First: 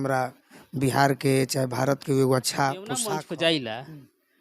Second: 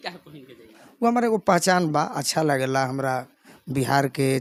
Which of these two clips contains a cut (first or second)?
first